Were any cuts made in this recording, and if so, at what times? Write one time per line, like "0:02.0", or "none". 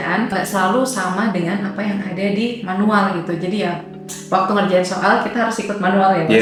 none